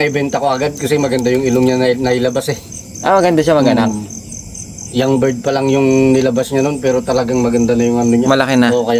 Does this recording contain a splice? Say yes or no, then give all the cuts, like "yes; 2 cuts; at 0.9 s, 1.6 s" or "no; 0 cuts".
no; 0 cuts